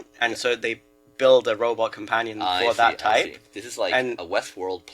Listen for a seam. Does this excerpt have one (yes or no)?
no